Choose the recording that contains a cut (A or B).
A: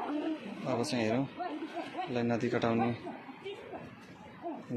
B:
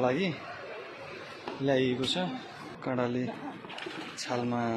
B